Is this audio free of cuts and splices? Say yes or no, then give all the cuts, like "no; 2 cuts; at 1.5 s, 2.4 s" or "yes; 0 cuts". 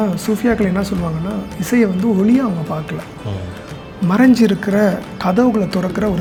yes; 0 cuts